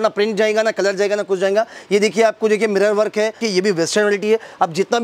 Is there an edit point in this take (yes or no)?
yes